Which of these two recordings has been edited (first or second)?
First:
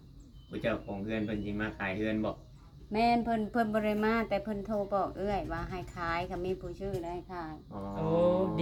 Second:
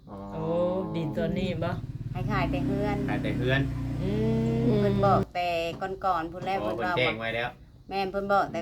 second